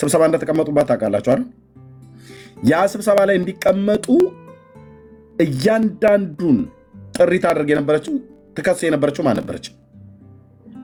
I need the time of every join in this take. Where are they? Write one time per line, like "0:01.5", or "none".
none

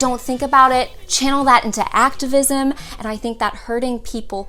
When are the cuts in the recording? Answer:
none

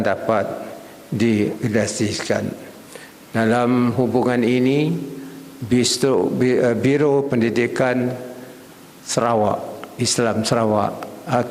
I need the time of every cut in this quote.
none

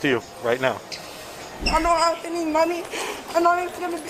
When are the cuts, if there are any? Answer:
0:01.6

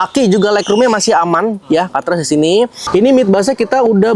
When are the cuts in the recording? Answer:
0:02.8

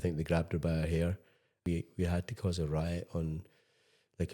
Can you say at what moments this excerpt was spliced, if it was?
0:01.5

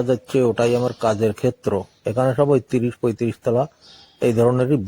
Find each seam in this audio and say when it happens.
0:01.9

